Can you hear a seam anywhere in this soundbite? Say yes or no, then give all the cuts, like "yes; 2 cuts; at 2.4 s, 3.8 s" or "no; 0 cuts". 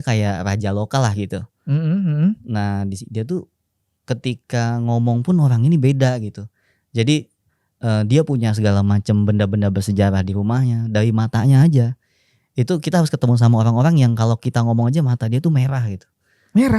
no; 0 cuts